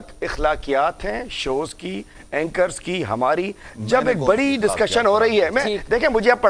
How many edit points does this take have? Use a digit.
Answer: 0